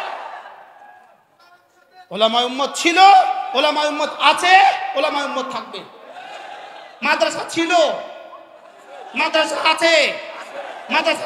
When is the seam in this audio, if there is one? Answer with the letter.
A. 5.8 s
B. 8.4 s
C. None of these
C